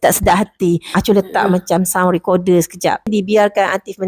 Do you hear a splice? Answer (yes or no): yes